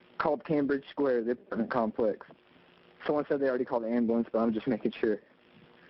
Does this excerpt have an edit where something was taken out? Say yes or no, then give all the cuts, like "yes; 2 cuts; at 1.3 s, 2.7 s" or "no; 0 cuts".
no; 0 cuts